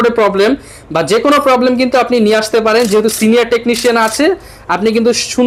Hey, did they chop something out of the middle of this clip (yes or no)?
no